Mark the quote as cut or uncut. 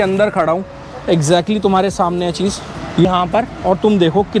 cut